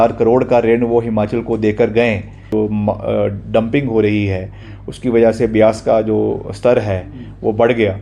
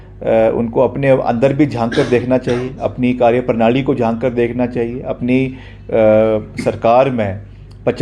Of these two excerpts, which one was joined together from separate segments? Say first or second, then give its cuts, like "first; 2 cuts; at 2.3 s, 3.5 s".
first; 1 cut; at 2.4 s